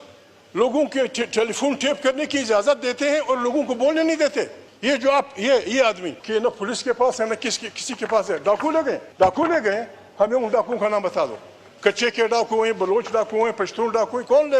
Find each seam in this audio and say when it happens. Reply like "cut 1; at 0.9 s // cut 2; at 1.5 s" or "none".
cut 1; at 4.6 s // cut 2; at 6.1 s // cut 3; at 9.1 s